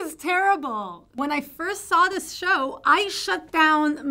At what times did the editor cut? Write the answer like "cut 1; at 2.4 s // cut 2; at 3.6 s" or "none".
cut 1; at 1.2 s